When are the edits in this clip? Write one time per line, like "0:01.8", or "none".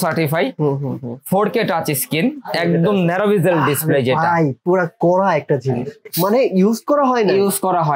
0:06.0